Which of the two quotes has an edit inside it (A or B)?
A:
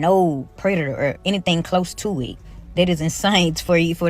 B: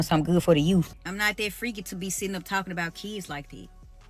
B